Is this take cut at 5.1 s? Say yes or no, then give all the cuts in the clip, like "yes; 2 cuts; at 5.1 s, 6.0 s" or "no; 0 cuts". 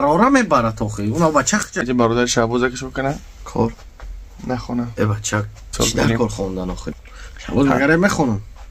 no; 2 cuts; at 1.8 s, 7.0 s